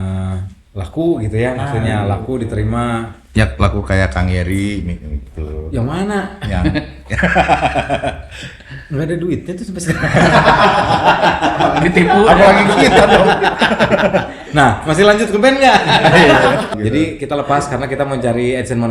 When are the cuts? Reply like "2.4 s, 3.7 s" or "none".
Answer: 16.7 s